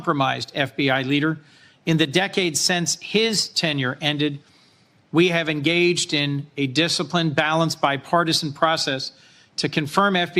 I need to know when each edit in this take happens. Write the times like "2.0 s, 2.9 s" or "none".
none